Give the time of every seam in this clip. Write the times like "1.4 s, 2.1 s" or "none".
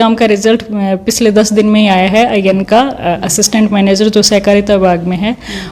none